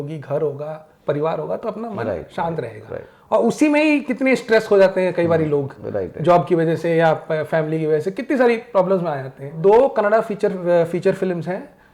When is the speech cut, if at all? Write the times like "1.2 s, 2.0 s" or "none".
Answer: 9.6 s